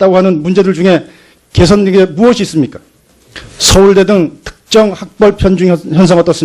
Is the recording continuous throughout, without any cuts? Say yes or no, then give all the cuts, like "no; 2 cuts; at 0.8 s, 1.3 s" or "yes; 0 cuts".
yes; 0 cuts